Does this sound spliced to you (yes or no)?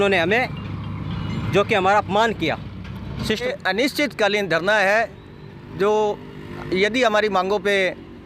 yes